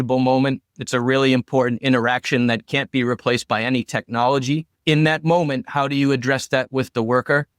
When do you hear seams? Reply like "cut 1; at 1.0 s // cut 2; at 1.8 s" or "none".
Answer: cut 1; at 4.7 s